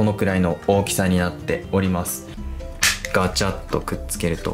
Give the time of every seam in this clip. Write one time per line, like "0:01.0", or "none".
0:02.4